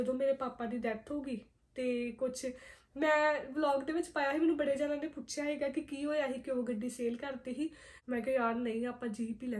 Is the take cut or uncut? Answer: cut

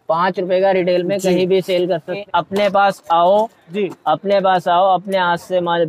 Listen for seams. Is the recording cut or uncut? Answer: cut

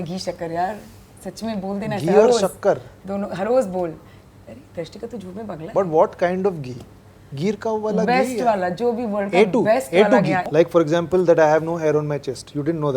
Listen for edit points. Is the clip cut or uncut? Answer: cut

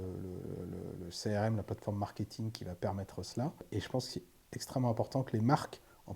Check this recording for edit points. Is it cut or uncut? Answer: cut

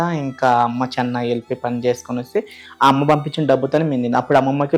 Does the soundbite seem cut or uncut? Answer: uncut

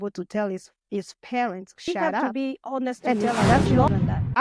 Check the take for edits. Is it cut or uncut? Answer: cut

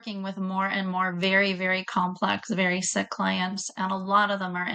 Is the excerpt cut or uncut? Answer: uncut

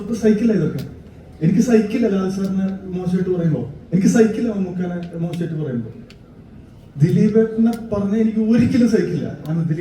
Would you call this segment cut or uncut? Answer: uncut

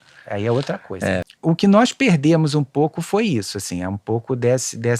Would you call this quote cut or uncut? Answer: cut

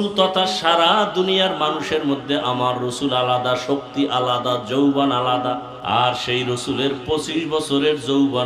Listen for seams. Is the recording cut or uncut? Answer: cut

